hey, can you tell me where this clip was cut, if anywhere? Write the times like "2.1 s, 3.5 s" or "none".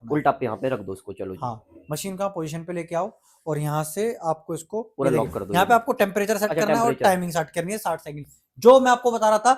none